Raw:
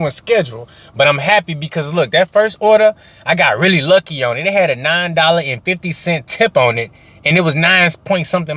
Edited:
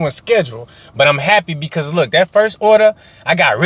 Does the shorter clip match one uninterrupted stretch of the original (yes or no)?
yes